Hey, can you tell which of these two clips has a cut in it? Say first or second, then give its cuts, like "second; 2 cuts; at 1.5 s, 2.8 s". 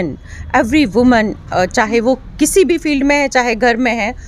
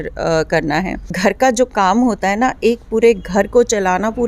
second; 1 cut; at 1.0 s